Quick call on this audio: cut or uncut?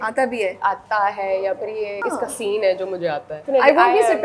cut